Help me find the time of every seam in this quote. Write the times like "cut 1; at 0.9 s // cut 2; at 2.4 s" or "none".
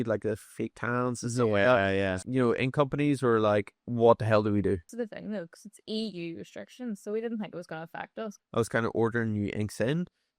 cut 1; at 2.2 s // cut 2; at 3.8 s // cut 3; at 4.9 s // cut 4; at 8.3 s